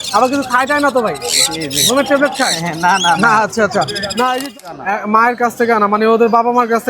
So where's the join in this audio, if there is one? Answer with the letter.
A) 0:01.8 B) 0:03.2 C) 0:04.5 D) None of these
C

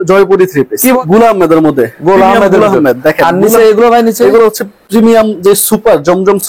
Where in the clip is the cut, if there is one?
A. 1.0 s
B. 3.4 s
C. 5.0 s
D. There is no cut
A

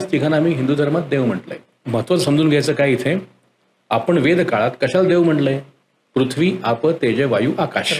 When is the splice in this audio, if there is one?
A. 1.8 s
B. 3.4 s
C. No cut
A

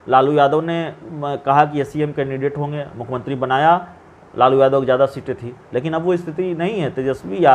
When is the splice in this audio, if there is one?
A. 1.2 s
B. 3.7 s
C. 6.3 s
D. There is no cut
D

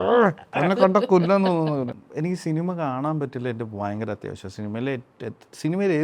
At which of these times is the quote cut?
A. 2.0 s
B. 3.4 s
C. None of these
A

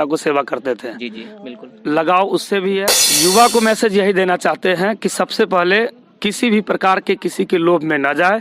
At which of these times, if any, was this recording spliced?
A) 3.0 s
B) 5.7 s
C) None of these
A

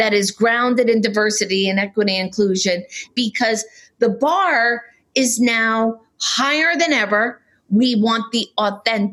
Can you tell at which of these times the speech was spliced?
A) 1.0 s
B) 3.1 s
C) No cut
B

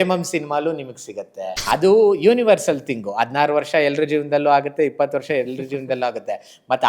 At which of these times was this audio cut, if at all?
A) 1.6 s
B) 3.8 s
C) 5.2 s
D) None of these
A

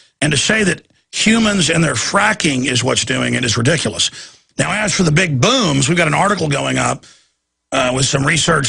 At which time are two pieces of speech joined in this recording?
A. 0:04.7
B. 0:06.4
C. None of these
A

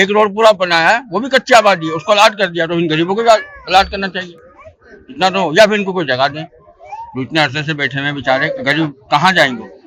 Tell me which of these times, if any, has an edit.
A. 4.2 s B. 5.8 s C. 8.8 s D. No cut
D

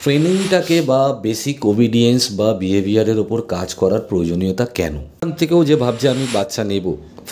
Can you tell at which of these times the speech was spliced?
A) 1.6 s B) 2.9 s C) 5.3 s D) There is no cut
C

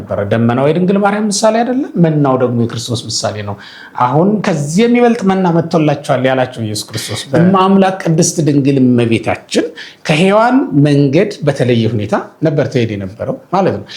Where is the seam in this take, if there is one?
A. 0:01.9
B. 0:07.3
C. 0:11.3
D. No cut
B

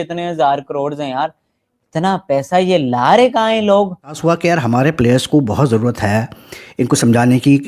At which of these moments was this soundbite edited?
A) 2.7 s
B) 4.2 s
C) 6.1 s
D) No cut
B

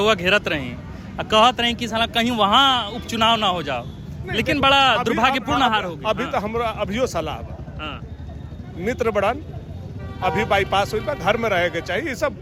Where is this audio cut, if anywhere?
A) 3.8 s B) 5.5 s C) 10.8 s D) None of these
D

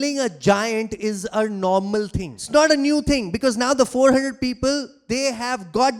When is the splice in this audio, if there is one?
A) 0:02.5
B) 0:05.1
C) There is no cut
A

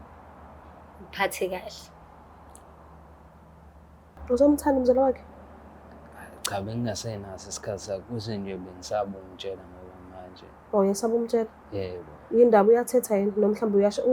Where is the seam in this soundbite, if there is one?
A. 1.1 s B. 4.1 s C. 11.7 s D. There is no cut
B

